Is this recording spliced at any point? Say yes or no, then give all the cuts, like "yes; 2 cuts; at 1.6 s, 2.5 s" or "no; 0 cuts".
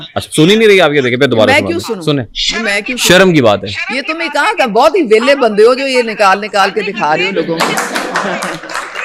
no; 0 cuts